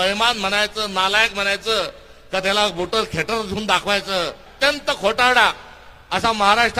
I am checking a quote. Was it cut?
yes; 1 cut; at 4.5 s

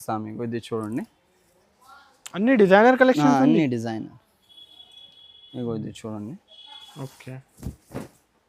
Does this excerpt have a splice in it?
no; 0 cuts

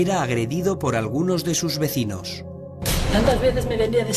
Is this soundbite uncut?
yes; 0 cuts

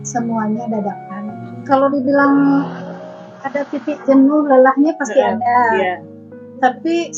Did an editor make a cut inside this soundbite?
yes; 1 cut; at 1.5 s

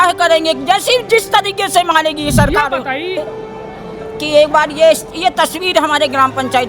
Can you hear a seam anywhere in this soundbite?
yes; 1 cut; at 3.2 s

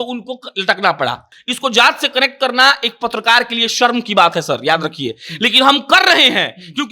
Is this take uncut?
no; 1 cut; at 1.3 s

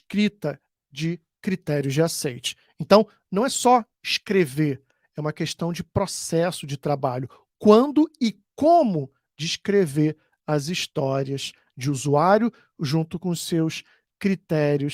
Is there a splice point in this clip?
no; 0 cuts

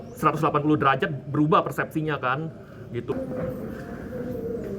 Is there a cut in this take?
yes; 1 cut; at 3.1 s

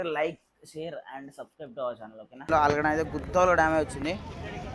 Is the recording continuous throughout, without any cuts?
no; 1 cut; at 2.5 s

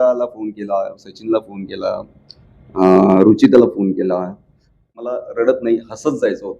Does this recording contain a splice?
yes; 1 cut; at 5.1 s

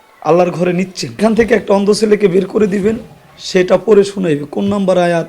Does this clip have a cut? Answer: yes; 1 cut; at 1.2 s

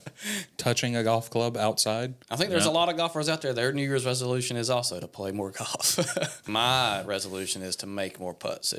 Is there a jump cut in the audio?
yes; 2 cuts; at 2.2 s, 6.4 s

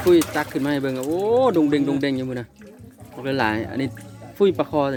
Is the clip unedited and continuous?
yes; 0 cuts

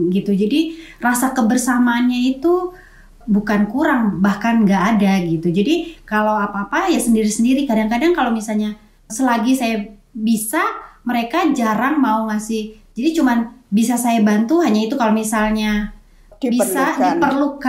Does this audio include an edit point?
no; 0 cuts

